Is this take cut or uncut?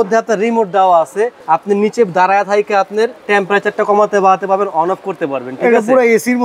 cut